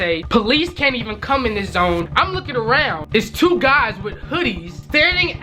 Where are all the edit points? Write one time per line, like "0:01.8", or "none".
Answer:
0:02.1